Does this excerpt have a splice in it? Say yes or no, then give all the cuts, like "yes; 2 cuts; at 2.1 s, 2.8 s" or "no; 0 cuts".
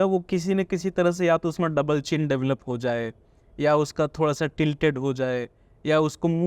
no; 0 cuts